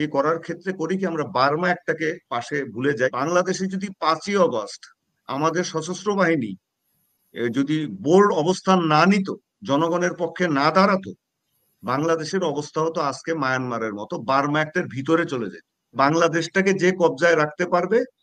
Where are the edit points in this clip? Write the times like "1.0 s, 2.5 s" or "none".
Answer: 3.1 s, 15.9 s